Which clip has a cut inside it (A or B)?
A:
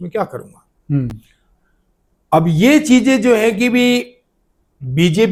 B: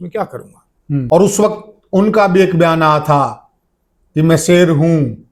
B